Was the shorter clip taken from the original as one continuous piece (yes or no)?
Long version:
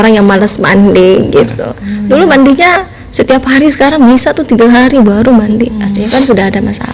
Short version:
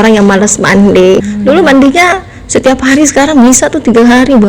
no